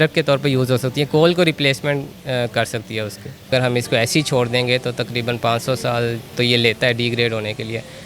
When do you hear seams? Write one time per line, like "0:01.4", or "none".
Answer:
0:03.5